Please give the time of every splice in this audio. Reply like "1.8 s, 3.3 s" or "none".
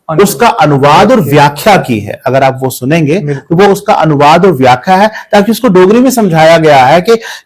none